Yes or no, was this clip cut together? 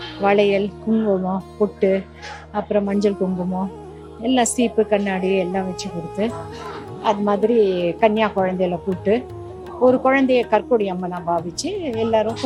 no